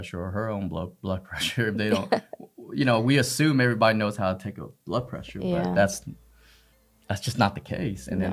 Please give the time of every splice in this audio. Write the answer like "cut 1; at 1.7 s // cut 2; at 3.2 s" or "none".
none